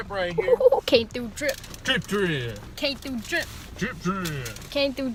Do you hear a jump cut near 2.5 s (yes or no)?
no